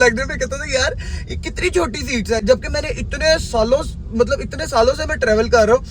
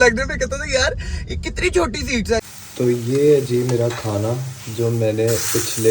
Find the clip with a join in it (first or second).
second